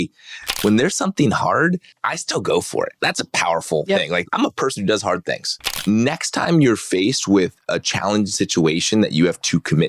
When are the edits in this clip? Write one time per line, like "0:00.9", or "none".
0:01.9
0:03.0
0:04.2
0:05.7